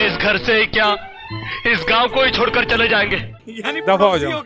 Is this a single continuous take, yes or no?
yes